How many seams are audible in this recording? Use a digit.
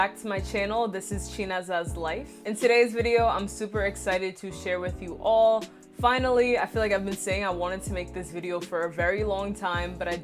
1